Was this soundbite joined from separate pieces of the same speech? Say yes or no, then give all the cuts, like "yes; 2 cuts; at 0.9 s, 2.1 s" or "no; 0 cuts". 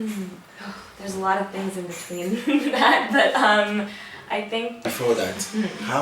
yes; 1 cut; at 4.7 s